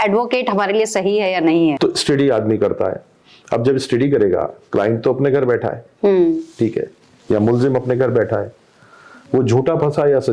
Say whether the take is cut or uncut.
cut